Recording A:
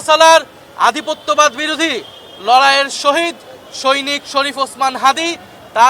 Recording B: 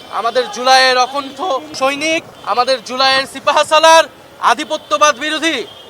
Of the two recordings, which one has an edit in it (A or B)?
B